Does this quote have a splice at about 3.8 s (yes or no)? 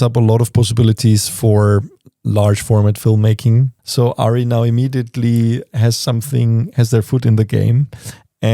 yes